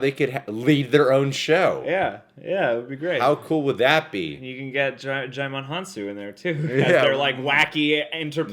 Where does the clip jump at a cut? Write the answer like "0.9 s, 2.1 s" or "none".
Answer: none